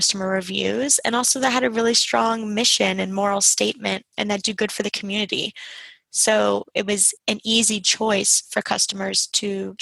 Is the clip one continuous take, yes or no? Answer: yes